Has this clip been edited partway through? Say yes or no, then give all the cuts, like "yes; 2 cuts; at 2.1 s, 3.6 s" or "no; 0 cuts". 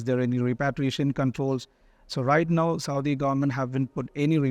no; 0 cuts